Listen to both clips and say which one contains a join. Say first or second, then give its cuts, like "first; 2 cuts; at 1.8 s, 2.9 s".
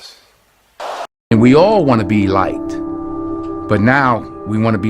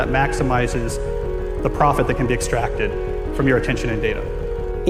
first; 1 cut; at 1.3 s